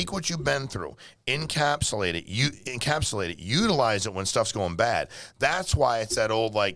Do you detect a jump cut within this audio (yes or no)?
no